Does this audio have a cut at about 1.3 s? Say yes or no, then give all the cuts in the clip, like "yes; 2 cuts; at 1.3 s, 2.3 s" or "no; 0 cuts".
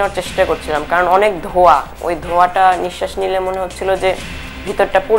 no; 0 cuts